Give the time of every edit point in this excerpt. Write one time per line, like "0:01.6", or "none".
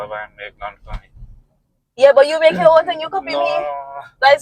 none